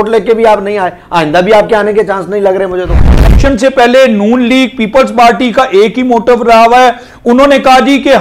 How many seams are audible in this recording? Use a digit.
1